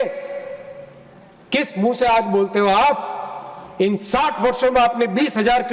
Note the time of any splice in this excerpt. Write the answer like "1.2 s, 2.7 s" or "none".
none